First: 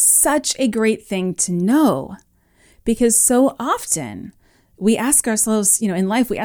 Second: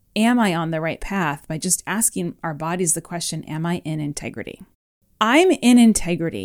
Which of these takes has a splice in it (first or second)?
second